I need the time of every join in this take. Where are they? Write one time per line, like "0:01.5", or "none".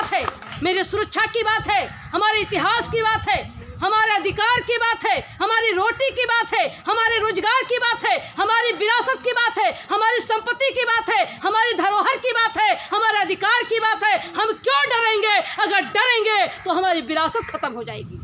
none